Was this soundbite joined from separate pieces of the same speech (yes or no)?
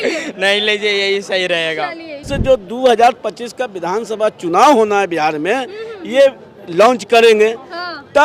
yes